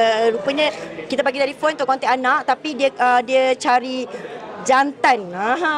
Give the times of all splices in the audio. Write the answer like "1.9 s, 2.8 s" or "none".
none

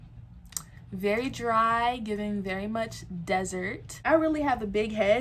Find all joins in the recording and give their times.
4.0 s

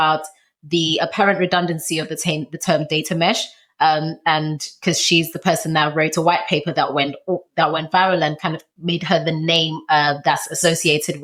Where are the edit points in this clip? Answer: none

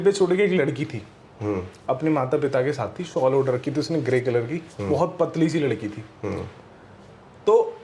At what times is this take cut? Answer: none

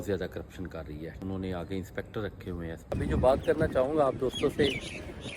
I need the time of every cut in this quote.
1.2 s, 2.9 s

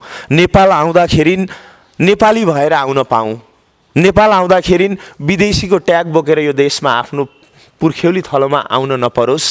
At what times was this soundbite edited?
none

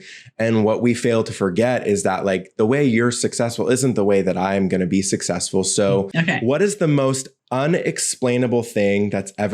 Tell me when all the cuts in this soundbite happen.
6.1 s

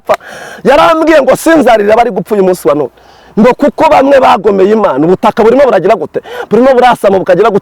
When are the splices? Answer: none

